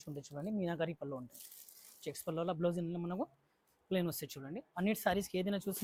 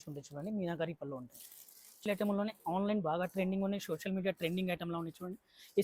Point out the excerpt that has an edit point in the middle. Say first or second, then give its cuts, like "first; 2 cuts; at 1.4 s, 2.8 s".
second; 1 cut; at 1.9 s